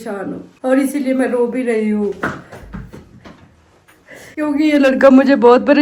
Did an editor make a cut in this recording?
no; 0 cuts

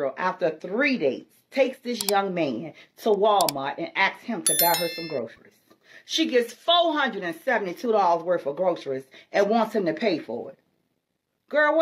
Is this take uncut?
yes; 0 cuts

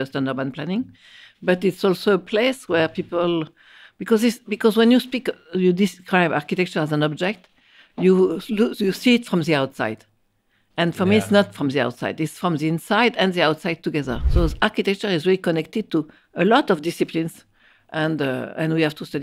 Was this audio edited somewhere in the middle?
yes; 1 cut; at 14.2 s

